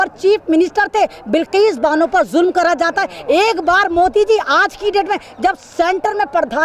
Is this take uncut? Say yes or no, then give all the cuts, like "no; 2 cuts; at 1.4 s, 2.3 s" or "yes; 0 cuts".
yes; 0 cuts